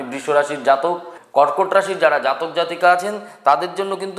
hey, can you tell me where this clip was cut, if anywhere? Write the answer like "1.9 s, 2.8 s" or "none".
1.1 s

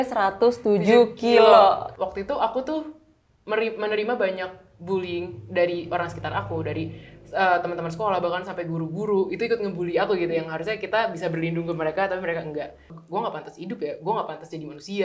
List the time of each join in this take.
1.9 s, 13.0 s

